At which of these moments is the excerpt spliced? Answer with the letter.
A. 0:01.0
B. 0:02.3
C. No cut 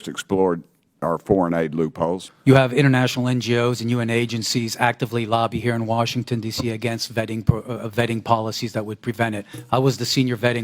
B